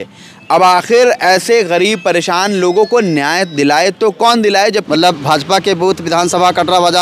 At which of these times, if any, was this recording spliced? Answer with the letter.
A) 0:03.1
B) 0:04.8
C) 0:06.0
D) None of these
B